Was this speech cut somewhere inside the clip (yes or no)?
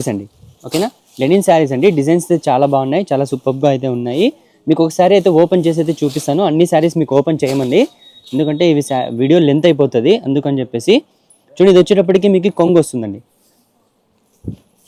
no